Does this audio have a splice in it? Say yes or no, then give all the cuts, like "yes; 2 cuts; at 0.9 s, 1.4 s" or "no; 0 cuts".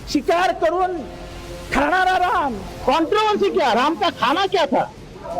yes; 1 cut; at 2.8 s